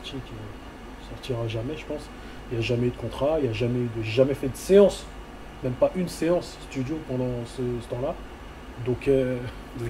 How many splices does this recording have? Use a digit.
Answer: 0